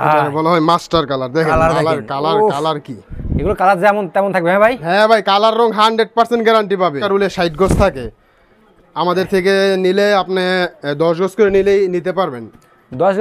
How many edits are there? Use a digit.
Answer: 1